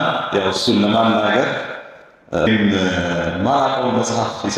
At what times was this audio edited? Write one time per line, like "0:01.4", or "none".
0:02.5